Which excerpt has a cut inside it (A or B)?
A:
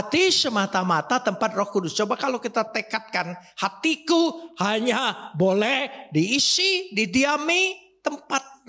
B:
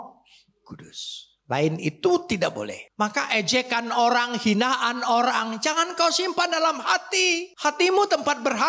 B